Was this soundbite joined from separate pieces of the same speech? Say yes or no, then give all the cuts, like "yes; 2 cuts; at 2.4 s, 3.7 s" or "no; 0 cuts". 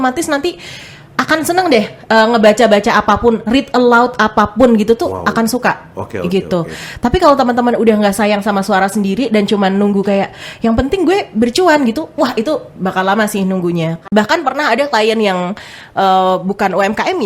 yes; 1 cut; at 14.0 s